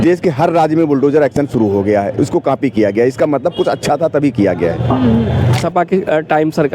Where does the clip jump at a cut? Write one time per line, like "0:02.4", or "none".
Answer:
0:05.6